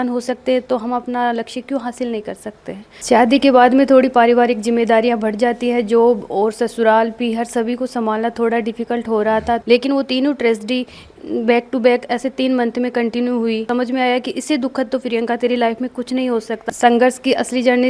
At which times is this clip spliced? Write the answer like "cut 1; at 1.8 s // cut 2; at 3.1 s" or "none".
cut 1; at 2.9 s // cut 2; at 9.6 s // cut 3; at 13.6 s // cut 4; at 16.6 s